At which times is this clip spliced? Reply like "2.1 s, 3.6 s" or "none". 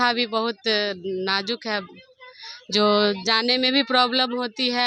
none